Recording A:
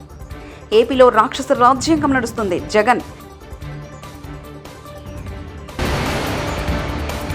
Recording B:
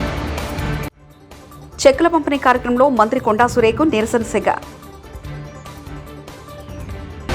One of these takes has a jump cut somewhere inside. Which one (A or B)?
B